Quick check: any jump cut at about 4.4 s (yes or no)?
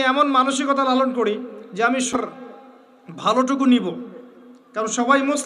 no